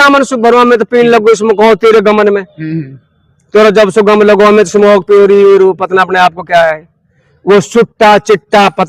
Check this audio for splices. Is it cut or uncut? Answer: uncut